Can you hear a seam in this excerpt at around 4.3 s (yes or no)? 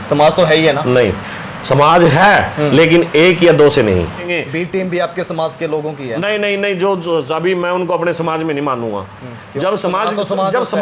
yes